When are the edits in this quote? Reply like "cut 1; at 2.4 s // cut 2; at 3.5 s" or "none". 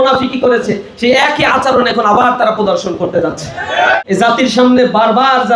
cut 1; at 4.0 s